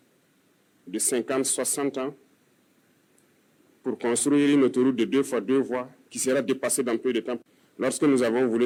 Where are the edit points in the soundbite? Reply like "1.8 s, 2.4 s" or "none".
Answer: none